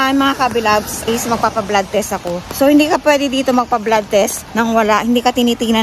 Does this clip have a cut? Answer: yes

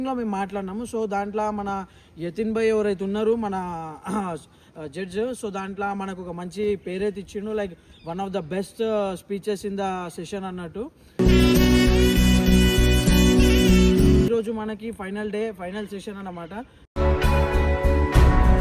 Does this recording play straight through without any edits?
no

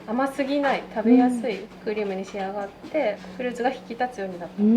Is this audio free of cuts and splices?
no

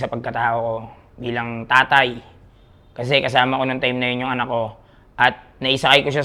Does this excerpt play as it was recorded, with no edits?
yes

